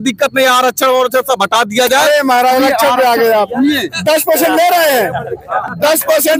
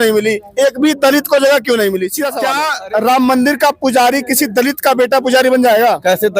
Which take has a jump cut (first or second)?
second